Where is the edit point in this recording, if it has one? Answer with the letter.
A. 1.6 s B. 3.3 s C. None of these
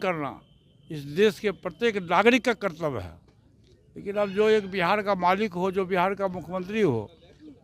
C